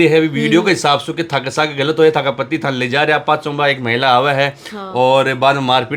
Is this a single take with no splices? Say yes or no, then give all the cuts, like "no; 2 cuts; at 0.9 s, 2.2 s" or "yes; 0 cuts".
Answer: yes; 0 cuts